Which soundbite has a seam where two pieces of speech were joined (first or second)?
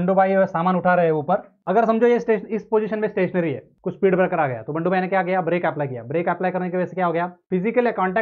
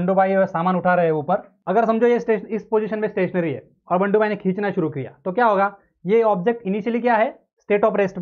first